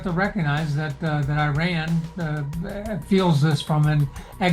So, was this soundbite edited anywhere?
no; 0 cuts

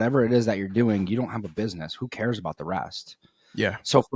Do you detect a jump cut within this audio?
no; 0 cuts

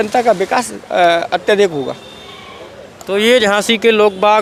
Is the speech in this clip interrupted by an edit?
no; 0 cuts

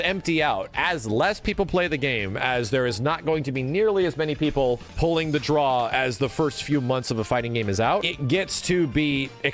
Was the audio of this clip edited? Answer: yes; 1 cut; at 8.1 s

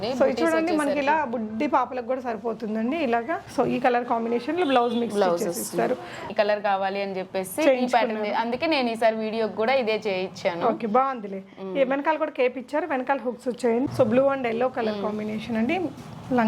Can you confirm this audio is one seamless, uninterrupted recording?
no; 3 cuts; at 3.4 s, 6.2 s, 13.9 s

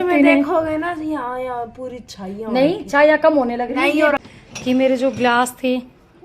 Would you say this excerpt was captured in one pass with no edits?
no; 1 cut; at 4.2 s

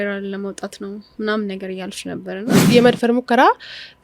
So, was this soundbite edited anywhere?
yes; 1 cut; at 2.7 s

